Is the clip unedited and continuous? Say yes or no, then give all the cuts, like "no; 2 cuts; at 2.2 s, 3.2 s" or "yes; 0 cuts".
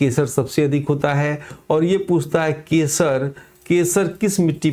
yes; 0 cuts